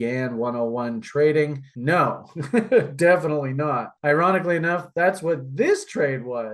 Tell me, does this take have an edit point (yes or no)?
no